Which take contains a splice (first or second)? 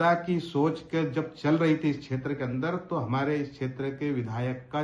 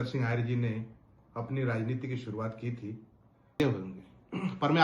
second